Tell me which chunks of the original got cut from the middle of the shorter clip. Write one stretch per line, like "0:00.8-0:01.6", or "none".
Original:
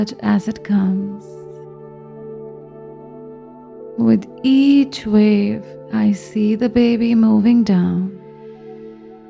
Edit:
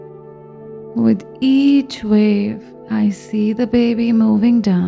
0:02.5-0:04.0